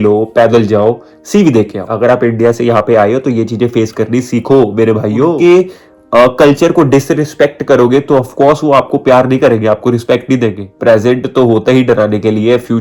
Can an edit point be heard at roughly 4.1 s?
no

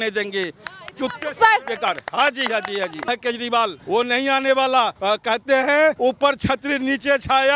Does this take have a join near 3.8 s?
yes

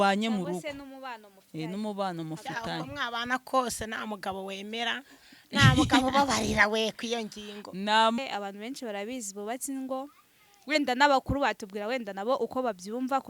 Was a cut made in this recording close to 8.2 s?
yes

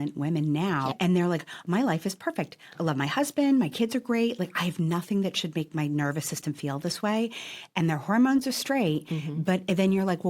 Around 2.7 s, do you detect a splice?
yes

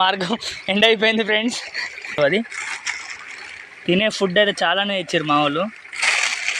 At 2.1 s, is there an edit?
yes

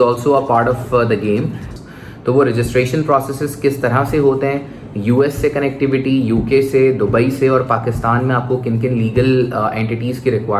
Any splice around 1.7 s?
yes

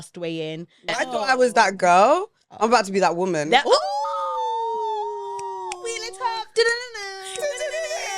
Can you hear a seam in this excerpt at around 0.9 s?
yes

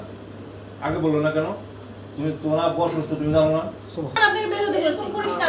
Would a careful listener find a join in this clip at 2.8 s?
no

